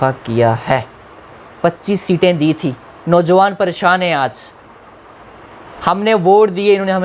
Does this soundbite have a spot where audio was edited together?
no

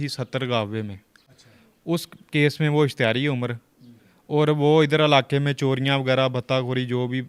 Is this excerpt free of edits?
yes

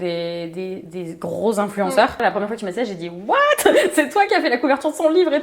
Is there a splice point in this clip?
yes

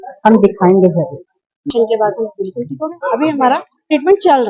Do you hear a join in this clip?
yes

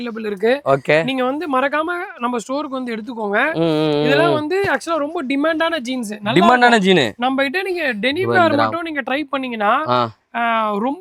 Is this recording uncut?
yes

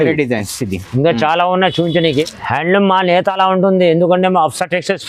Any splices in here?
yes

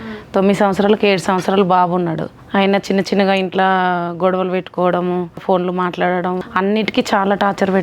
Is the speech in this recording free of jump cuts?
no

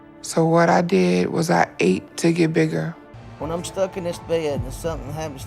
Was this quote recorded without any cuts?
no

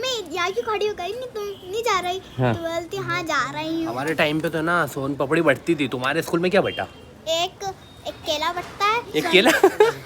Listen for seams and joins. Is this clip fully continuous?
no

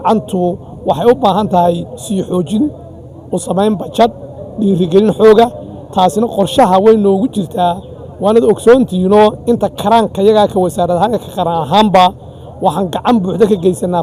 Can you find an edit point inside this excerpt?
no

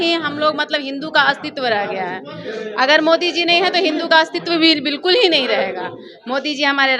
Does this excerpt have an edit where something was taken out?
no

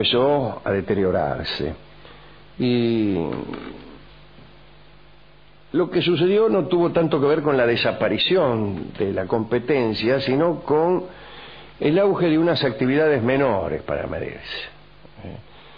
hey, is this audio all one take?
yes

